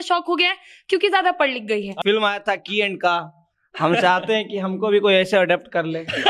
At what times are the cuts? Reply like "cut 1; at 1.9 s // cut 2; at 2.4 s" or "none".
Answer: cut 1; at 2.0 s